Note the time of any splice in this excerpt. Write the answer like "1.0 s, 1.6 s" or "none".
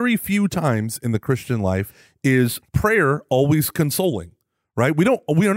2.0 s, 2.6 s